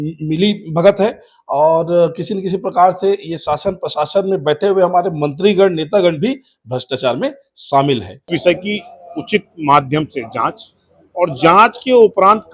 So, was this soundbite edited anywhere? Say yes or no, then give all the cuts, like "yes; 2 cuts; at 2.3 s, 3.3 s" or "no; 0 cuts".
yes; 1 cut; at 8.3 s